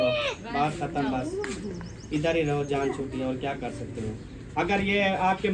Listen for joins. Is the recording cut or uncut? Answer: uncut